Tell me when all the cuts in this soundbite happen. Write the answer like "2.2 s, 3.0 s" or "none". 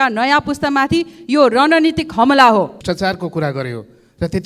2.8 s